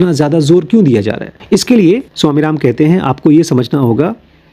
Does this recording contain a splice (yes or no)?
yes